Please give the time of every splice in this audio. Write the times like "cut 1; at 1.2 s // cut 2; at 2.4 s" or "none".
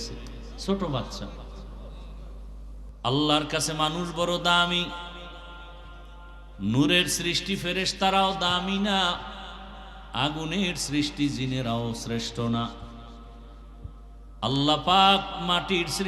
cut 1; at 2.9 s